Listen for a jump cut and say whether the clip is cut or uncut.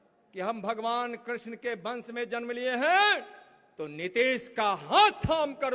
uncut